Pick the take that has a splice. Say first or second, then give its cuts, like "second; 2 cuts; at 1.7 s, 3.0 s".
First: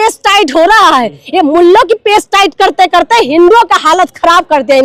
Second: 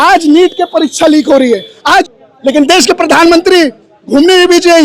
second; 1 cut; at 2.1 s